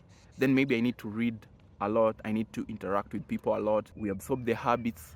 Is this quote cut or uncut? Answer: cut